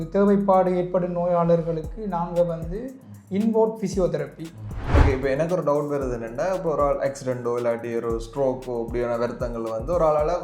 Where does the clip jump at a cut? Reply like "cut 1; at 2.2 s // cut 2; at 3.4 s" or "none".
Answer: cut 1; at 4.8 s